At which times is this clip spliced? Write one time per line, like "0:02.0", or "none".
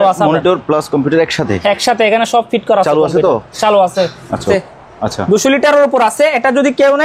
0:04.4